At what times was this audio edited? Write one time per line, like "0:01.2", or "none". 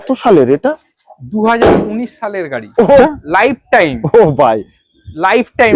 0:03.0

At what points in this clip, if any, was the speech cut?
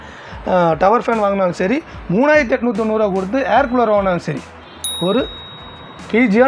none

